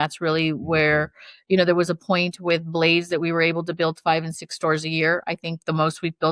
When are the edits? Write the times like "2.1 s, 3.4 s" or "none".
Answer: none